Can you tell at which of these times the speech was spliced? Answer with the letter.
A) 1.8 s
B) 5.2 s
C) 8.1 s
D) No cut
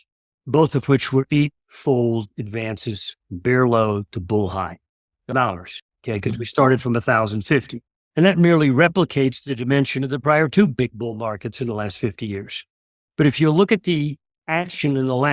B